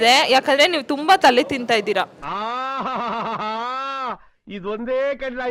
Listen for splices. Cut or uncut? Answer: uncut